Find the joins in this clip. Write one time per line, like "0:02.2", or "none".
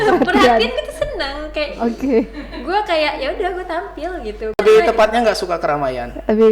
0:04.6